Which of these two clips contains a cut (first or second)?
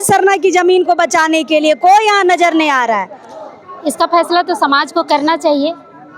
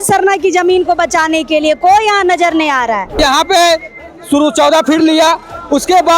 second